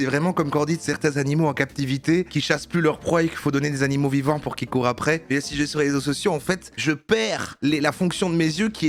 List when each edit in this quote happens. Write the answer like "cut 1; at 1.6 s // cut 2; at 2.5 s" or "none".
none